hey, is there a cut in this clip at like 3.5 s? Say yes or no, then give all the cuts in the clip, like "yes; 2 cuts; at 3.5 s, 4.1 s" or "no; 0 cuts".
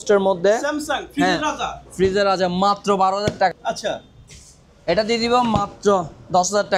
yes; 1 cut; at 3.5 s